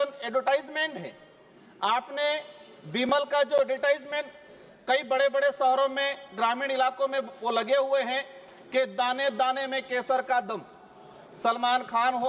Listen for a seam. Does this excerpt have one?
no; 0 cuts

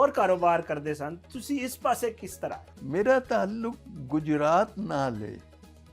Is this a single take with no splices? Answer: no; 1 cut; at 2.7 s

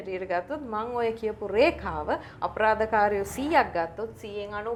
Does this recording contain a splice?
no; 0 cuts

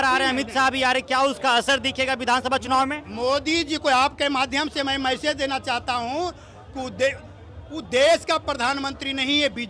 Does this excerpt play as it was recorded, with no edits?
yes; 0 cuts

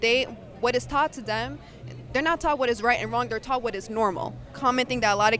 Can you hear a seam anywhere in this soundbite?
yes; 1 cut; at 4.5 s

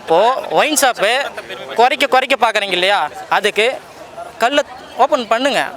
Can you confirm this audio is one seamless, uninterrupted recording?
yes; 0 cuts

